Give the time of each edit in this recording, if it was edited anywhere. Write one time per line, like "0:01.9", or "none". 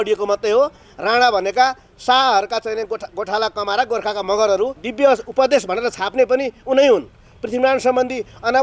0:04.8